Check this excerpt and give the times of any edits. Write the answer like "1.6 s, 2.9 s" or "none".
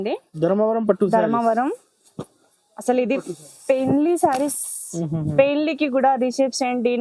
none